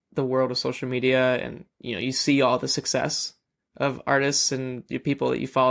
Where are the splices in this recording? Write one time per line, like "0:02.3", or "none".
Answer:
none